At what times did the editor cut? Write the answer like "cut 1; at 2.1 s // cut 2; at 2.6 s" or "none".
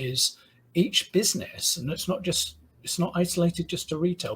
none